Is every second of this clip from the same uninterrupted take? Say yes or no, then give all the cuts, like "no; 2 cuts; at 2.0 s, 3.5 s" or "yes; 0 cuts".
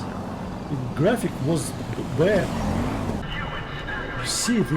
no; 1 cut; at 3.2 s